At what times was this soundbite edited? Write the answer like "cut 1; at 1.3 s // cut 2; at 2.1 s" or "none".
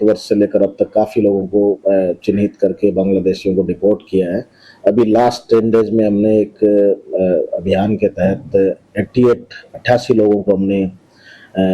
cut 1; at 8.2 s